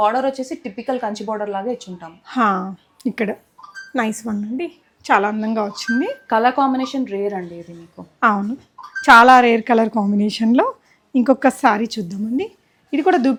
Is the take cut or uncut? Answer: uncut